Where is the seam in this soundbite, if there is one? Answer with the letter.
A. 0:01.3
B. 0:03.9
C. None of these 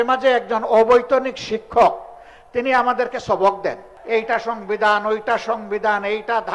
B